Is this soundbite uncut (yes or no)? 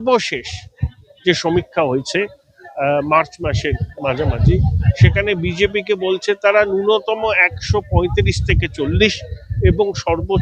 yes